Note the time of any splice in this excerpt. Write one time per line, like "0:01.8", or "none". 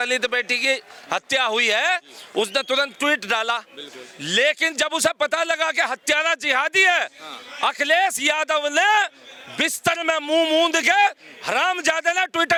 none